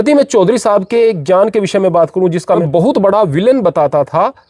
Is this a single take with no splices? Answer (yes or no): no